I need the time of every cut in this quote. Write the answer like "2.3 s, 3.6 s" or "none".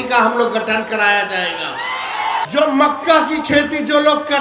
2.4 s